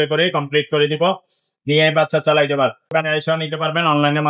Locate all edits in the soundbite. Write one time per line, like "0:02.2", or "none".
0:02.9